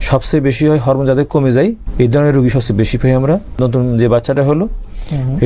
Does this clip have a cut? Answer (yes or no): yes